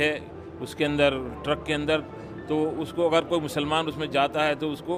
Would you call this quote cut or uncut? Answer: uncut